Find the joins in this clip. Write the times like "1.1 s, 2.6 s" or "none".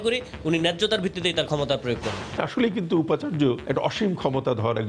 2.4 s, 3.6 s